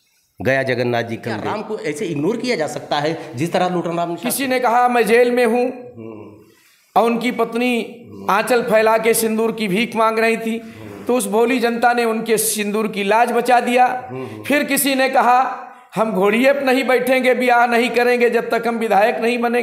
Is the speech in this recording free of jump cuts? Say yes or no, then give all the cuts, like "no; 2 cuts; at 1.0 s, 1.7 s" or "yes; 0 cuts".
no; 2 cuts; at 1.5 s, 4.3 s